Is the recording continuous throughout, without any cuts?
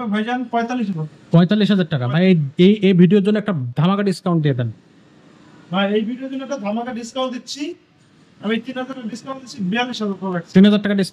yes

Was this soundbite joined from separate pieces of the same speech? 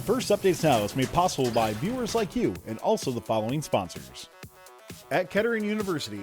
yes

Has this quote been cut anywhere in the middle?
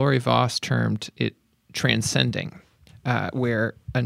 no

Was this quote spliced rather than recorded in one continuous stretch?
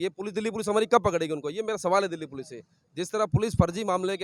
no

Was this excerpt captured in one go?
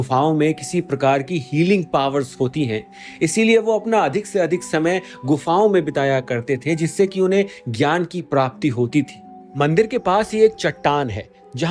yes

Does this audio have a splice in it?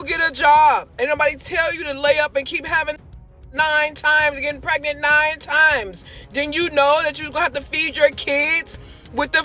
no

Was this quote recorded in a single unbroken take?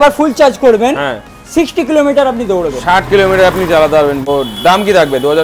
no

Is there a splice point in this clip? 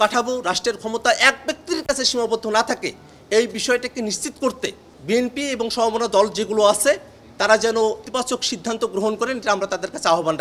yes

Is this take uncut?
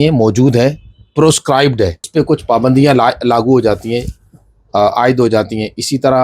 no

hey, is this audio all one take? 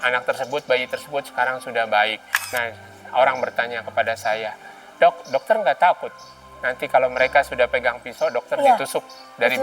no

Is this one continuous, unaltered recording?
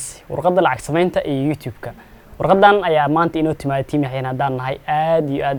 yes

